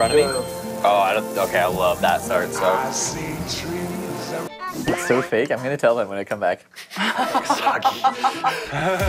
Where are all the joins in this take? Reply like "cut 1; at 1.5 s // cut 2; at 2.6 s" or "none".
cut 1; at 4.5 s